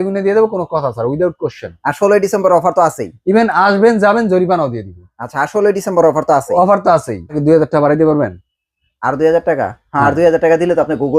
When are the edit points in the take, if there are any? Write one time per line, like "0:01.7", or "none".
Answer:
0:07.4